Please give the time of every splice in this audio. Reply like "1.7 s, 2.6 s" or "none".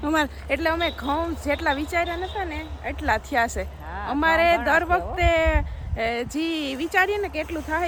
none